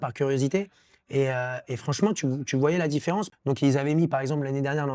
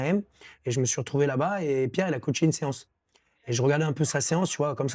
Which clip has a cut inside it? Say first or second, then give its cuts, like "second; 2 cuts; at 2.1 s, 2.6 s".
first; 1 cut; at 3.3 s